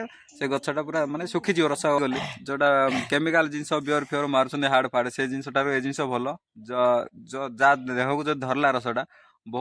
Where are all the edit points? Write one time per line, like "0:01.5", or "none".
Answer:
0:02.0